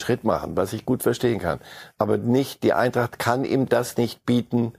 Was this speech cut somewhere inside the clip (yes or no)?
no